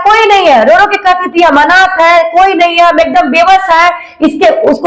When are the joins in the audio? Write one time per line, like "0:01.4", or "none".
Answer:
none